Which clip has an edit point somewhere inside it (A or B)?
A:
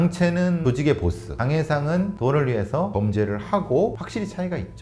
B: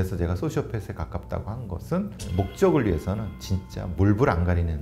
A